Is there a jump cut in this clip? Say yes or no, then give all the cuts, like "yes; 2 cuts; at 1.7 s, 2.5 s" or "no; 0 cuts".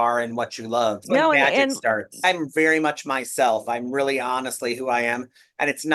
yes; 2 cuts; at 1.1 s, 2.2 s